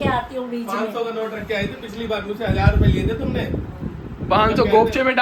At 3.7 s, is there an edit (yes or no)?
no